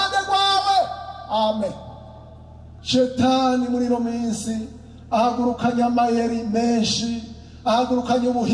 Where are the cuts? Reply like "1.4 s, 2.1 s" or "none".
2.8 s